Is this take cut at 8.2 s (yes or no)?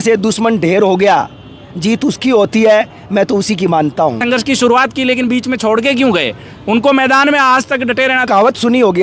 yes